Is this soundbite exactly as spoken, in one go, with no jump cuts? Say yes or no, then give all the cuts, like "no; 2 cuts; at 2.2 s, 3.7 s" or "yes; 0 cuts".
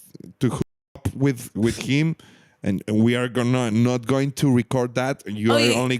yes; 0 cuts